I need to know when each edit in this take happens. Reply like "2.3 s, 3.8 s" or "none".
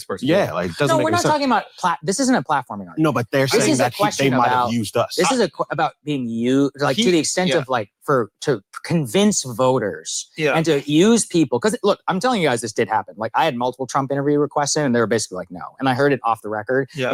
none